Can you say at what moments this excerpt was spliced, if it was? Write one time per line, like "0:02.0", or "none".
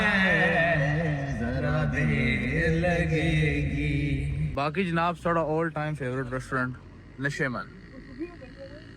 0:04.4